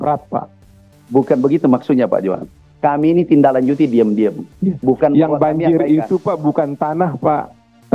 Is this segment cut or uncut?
cut